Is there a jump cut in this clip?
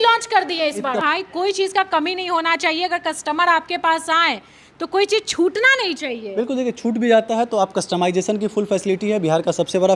yes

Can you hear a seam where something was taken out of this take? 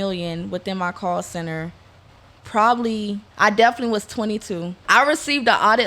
yes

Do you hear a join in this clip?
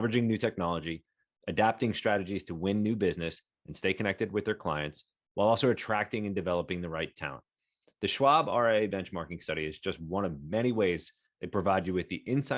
no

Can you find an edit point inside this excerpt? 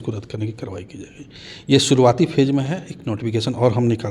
no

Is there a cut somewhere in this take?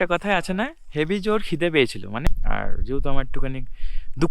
yes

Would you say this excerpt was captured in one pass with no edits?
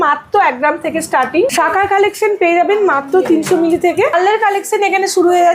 no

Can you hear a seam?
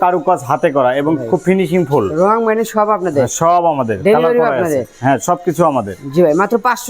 no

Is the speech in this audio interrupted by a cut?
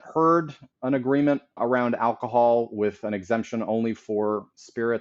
no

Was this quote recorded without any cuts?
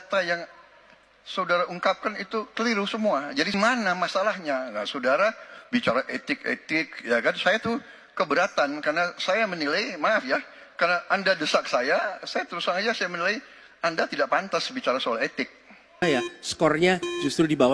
no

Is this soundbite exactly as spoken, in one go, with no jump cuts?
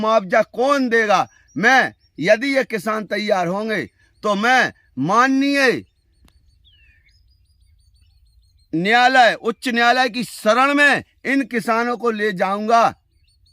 yes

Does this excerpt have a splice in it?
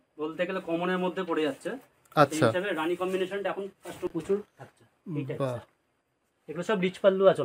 yes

